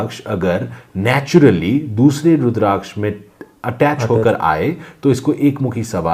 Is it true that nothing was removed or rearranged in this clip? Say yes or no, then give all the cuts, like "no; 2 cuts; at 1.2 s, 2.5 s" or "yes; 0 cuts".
yes; 0 cuts